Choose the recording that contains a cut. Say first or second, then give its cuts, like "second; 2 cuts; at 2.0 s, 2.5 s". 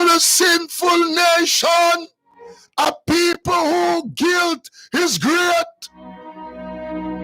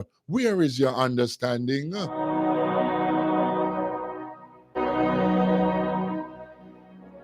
second; 1 cut; at 4.8 s